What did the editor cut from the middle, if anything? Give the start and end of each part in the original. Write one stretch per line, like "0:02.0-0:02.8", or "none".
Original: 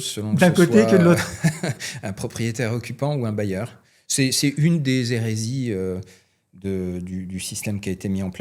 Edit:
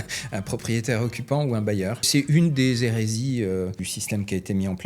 0:03.8-0:04.4
0:06.2-0:07.4